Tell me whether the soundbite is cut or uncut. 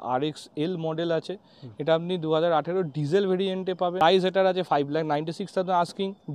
cut